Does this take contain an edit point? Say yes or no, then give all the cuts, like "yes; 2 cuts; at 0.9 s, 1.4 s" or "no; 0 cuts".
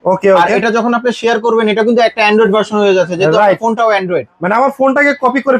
no; 0 cuts